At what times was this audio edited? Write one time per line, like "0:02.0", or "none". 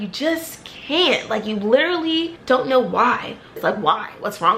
0:02.4
0:03.6